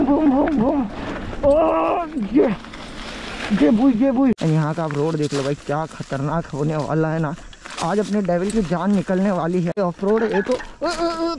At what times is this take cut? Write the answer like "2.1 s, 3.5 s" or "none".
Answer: 4.4 s, 9.8 s